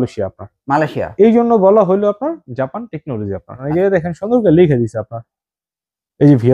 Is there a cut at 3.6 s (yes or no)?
yes